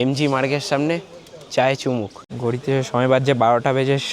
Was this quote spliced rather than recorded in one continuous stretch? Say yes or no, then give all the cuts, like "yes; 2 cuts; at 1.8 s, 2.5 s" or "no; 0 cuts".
yes; 1 cut; at 2.2 s